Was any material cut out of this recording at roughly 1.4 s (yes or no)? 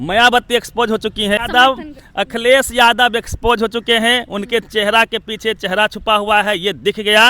yes